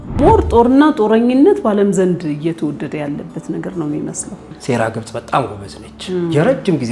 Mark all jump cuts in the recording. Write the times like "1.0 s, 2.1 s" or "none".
4.5 s